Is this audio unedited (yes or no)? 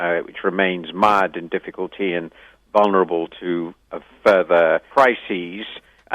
no